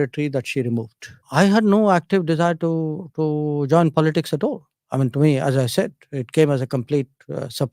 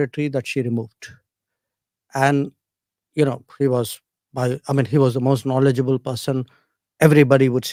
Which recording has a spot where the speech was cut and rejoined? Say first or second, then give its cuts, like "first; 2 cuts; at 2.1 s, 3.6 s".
first; 1 cut; at 1.2 s